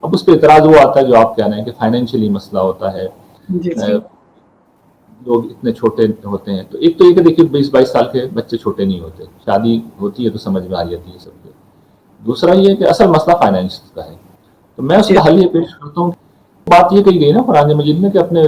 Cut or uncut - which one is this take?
cut